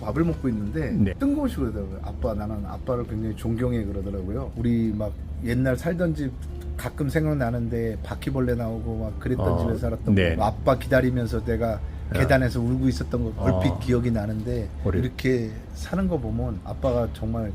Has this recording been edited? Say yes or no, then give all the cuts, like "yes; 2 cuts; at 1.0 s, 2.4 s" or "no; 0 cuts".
yes; 6 cuts; at 1.1 s, 4.5 s, 10.4 s, 13.4 s, 15.0 s, 16.7 s